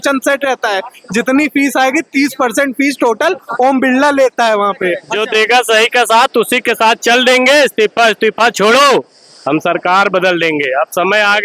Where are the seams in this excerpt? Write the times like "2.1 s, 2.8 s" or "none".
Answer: 5.1 s